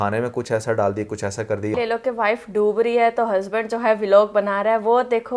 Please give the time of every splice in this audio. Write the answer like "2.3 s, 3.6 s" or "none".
1.7 s